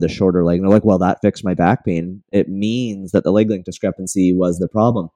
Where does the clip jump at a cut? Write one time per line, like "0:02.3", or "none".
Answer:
none